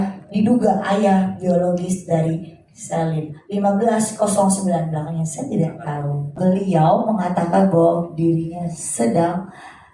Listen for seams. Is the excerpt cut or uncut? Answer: cut